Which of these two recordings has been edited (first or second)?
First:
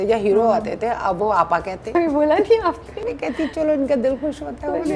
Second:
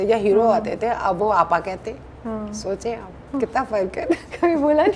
first